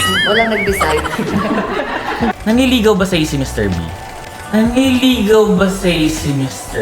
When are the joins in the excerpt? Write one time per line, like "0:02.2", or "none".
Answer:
0:02.4